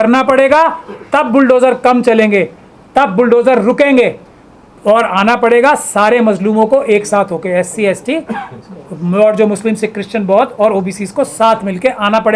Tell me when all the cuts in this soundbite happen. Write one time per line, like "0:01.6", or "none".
none